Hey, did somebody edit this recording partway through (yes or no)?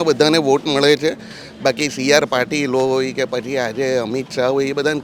no